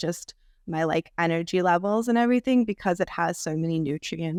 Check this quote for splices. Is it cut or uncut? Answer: uncut